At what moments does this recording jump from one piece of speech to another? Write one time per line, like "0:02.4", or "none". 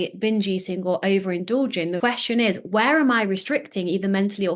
0:02.0